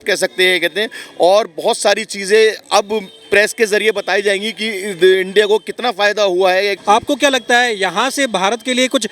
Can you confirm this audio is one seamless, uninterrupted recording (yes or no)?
no